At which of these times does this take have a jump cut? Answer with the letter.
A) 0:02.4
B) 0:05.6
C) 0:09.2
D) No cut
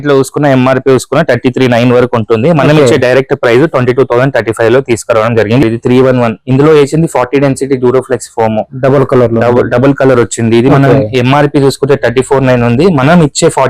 B